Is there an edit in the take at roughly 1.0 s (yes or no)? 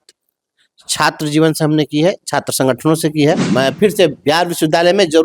no